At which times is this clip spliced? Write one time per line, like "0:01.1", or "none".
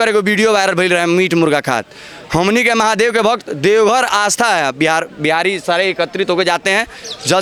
none